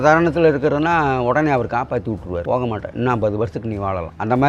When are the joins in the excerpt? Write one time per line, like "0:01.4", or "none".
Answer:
none